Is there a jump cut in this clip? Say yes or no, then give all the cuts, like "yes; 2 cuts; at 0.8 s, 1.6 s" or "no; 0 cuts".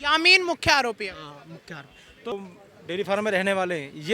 yes; 1 cut; at 2.3 s